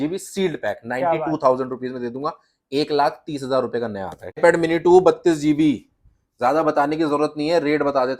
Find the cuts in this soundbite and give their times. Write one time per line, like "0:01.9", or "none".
0:04.4